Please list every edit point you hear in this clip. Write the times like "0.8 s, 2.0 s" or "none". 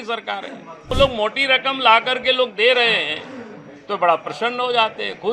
0.9 s